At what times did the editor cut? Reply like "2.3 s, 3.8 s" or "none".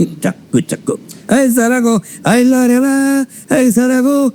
none